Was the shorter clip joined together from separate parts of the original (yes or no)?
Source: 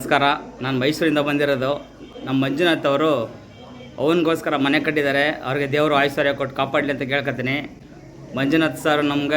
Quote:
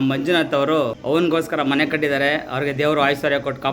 yes